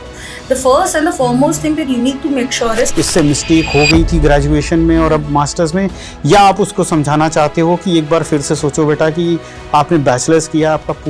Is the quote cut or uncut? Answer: cut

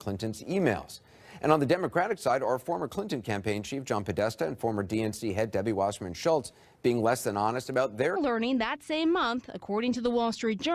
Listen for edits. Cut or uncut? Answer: uncut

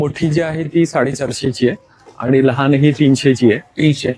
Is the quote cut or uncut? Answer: uncut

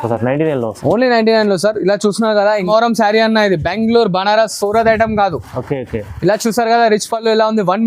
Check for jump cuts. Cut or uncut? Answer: cut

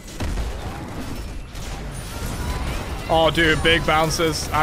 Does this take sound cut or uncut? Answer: uncut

